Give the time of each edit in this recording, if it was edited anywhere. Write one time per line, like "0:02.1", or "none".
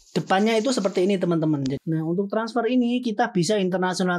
0:01.8